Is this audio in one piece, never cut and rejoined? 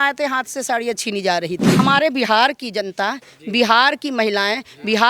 no; 1 cut; at 1.8 s

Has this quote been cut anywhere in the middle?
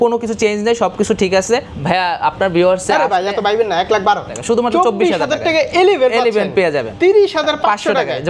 yes; 3 cuts; at 1.7 s, 4.4 s, 6.9 s

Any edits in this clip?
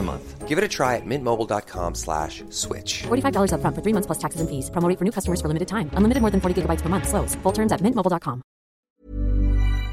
yes; 1 cut; at 8.9 s

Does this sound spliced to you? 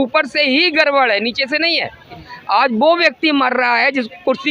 yes; 1 cut; at 2.2 s

